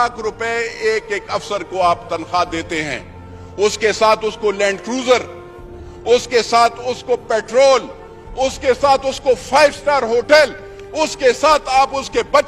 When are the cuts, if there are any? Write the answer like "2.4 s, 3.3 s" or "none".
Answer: none